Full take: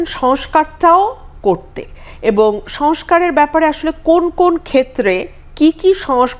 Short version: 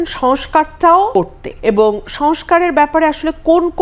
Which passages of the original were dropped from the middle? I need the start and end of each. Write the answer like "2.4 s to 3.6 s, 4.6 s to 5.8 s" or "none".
1.3 s to 1.9 s